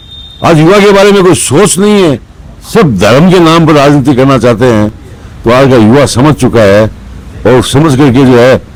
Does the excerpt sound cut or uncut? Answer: uncut